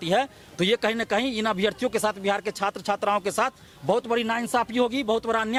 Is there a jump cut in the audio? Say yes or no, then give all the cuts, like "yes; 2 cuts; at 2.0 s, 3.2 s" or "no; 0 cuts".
no; 0 cuts